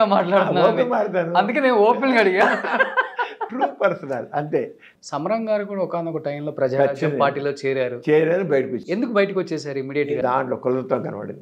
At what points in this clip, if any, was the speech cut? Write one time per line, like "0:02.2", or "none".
0:04.8
0:10.2